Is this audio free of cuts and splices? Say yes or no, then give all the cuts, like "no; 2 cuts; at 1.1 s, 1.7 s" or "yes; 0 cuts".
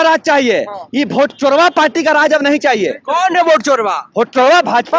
yes; 0 cuts